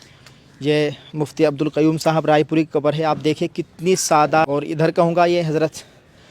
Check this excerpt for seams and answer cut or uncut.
cut